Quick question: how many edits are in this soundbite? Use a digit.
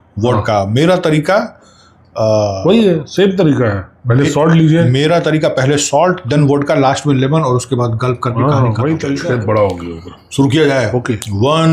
1